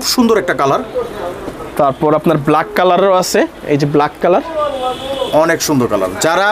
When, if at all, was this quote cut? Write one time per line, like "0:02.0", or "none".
none